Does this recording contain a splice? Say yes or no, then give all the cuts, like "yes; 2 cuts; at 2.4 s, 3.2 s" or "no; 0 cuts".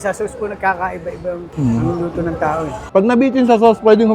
yes; 1 cut; at 2.8 s